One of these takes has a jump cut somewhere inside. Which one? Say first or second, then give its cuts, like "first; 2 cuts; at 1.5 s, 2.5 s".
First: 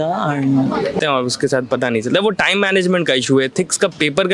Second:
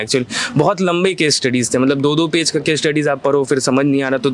first; 1 cut; at 1.0 s